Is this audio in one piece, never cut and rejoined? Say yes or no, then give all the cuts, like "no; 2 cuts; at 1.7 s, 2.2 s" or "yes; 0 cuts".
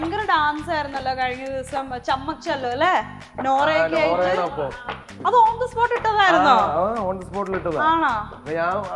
no; 1 cut; at 5.1 s